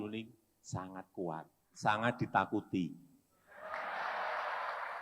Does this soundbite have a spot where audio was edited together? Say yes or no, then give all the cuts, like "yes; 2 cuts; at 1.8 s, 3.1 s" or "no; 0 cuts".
yes; 1 cut; at 1.6 s